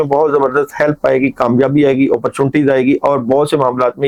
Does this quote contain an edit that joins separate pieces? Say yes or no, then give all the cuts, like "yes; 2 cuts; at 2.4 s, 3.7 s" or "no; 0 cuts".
no; 0 cuts